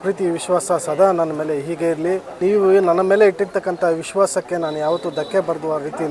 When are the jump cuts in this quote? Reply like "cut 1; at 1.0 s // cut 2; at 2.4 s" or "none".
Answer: cut 1; at 2.4 s